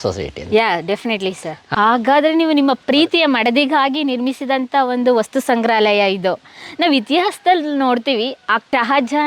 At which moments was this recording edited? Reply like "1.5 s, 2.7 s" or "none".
1.7 s